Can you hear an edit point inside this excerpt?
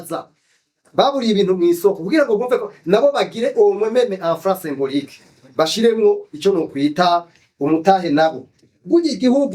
yes; 1 cut; at 8.7 s

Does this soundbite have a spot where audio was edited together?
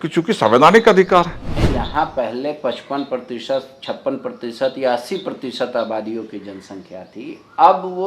yes; 1 cut; at 1.5 s

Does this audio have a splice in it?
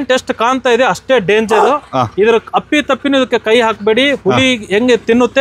no; 0 cuts

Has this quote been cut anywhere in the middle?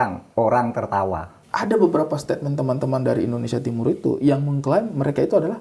yes; 1 cut; at 1.3 s

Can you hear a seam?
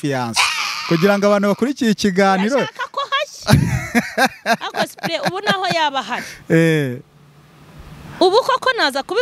no; 0 cuts

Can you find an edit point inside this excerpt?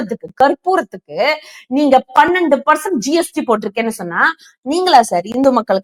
no; 0 cuts

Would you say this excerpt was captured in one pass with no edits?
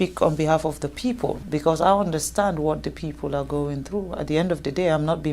no; 1 cut; at 1.4 s

